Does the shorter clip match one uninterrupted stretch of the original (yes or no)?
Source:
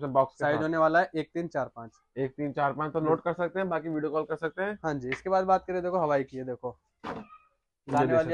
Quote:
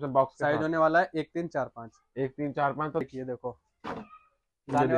no